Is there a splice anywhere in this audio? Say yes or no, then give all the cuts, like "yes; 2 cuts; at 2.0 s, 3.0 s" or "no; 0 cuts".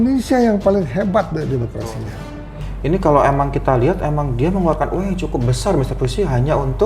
yes; 1 cut; at 2.6 s